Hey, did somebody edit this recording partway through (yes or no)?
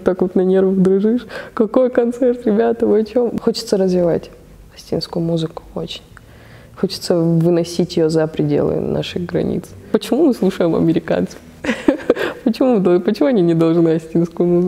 yes